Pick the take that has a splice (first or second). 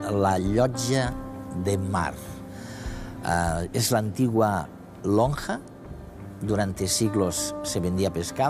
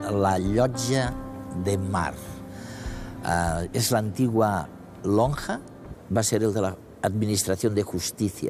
first